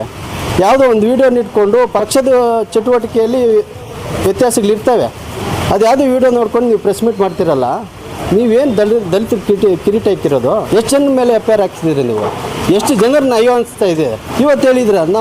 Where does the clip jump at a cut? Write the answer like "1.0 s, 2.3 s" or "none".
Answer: 2.0 s, 10.6 s, 14.3 s